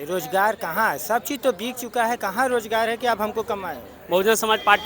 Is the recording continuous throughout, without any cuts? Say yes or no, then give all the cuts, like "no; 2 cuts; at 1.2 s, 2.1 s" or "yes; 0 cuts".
no; 1 cut; at 3.9 s